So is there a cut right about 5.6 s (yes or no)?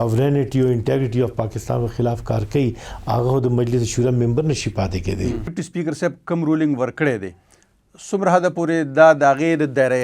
yes